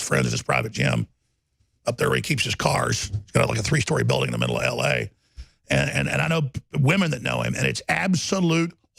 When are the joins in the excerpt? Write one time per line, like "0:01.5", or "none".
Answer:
none